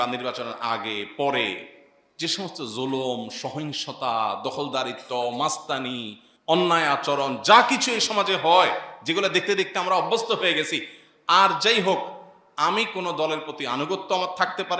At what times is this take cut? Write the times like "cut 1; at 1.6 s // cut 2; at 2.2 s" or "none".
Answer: none